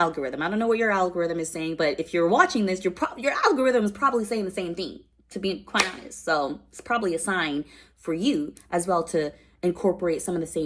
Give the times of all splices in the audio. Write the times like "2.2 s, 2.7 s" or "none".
none